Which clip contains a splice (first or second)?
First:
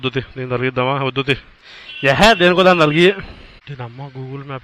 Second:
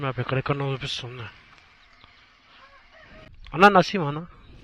first